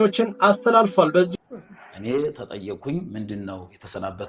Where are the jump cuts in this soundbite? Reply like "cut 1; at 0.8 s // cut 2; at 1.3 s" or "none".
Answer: cut 1; at 1.3 s